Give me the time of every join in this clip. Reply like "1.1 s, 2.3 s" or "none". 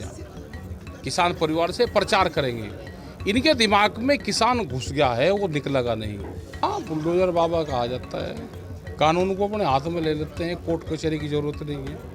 6.6 s